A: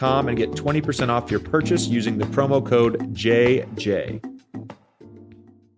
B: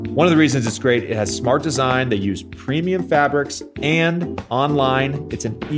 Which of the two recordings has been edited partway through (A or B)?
A